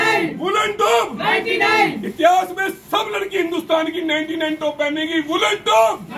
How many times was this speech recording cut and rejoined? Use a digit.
0